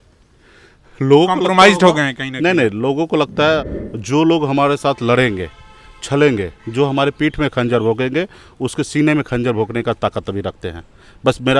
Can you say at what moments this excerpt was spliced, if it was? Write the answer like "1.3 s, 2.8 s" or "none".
3.6 s